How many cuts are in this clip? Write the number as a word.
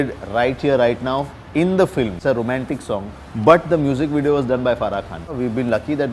two